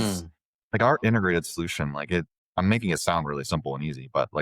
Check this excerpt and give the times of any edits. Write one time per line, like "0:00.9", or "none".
0:02.4